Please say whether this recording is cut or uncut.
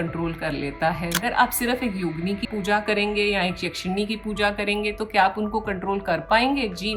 cut